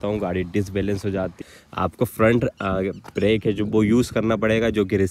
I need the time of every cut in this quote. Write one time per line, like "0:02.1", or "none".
0:01.4